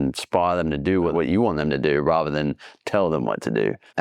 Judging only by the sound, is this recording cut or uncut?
cut